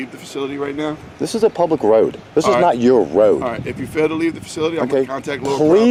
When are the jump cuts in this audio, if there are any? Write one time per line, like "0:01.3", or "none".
none